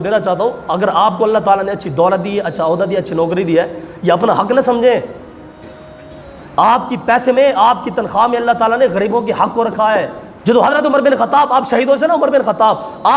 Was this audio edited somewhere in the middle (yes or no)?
yes